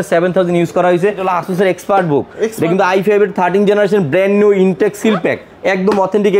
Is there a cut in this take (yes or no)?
yes